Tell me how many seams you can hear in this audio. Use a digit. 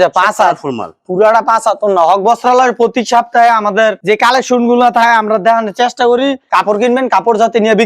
1